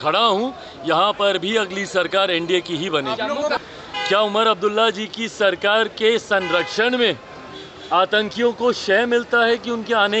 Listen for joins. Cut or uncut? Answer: cut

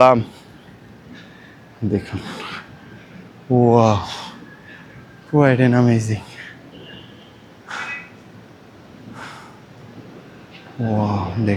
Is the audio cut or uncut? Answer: uncut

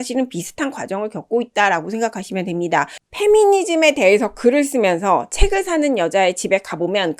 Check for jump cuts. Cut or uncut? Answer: cut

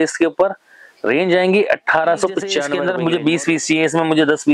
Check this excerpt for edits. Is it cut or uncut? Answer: cut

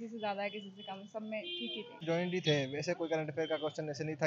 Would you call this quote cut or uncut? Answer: cut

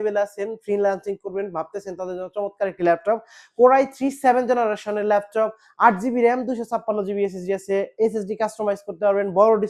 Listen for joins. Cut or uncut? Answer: uncut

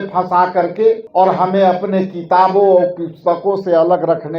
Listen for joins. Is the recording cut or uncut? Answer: cut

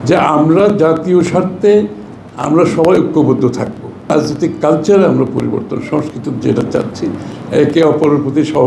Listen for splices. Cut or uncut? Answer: cut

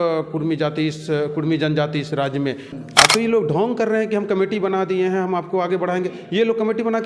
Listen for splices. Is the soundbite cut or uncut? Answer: cut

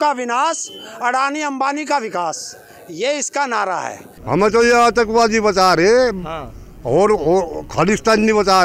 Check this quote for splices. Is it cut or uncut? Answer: cut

